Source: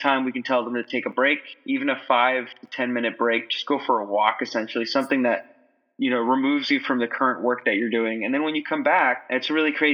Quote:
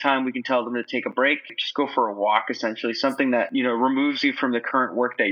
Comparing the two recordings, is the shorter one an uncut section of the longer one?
no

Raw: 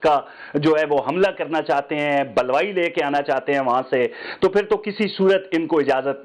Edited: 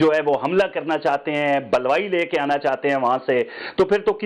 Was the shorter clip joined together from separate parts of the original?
no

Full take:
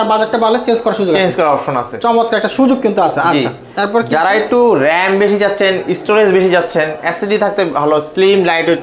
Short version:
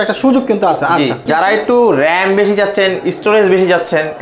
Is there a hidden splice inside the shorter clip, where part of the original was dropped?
yes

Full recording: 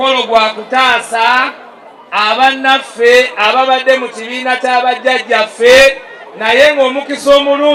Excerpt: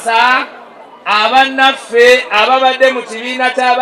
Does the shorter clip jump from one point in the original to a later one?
no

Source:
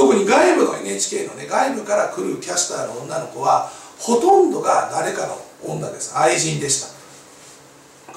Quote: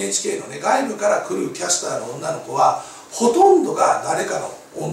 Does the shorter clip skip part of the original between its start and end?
no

